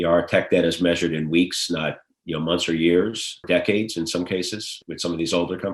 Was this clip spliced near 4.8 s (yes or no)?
yes